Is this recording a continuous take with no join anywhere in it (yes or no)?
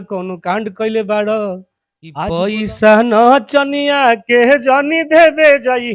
no